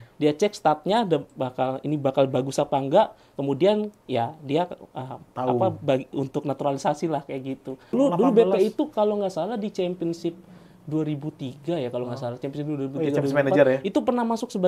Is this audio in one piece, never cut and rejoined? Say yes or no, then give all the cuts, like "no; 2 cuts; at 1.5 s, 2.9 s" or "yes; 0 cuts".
no; 1 cut; at 8.0 s